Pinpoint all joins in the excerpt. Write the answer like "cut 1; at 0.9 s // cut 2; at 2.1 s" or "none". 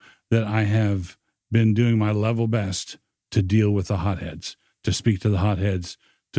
none